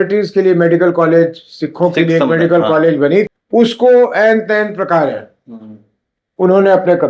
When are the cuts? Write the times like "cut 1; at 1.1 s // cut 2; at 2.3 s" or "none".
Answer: cut 1; at 3.4 s